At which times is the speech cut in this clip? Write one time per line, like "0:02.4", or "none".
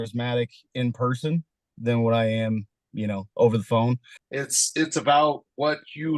0:04.1